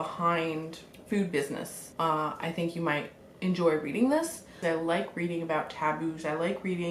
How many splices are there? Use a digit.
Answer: 2